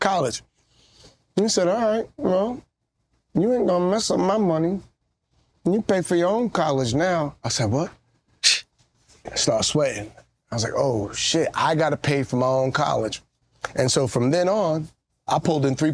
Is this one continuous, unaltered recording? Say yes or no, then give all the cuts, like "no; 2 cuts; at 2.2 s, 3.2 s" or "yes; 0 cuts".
yes; 0 cuts